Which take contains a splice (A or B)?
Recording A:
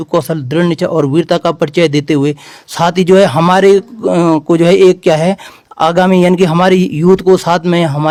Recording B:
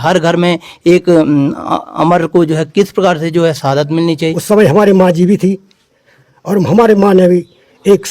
B